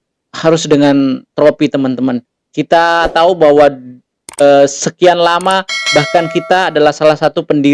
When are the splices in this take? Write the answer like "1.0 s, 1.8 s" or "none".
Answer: none

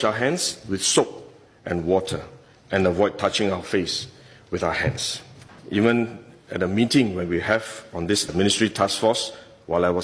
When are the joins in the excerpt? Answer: 5.5 s

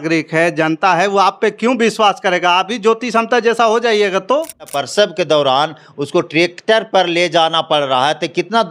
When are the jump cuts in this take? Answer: 4.8 s

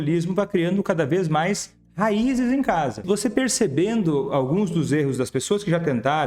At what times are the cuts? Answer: 3.0 s

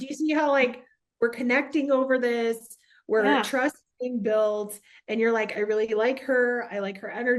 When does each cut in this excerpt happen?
none

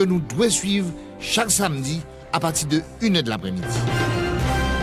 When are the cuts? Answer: 3.6 s

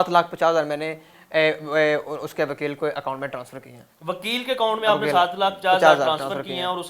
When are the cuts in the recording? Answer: none

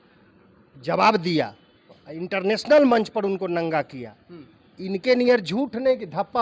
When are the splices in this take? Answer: none

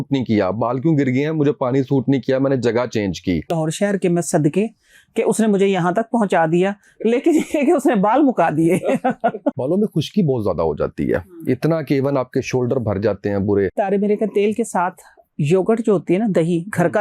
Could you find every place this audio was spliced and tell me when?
3.6 s, 9.6 s, 13.8 s

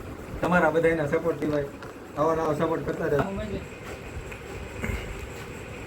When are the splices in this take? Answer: 3.2 s

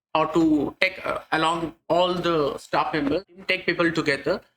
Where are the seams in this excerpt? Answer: 3.4 s

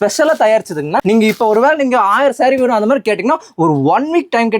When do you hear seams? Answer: 1.0 s

